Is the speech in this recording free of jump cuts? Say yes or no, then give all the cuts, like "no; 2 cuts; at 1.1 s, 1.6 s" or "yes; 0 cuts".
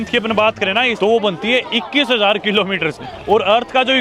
no; 1 cut; at 0.9 s